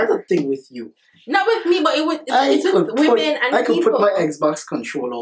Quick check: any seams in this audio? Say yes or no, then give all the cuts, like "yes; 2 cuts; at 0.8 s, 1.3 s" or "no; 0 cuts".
no; 0 cuts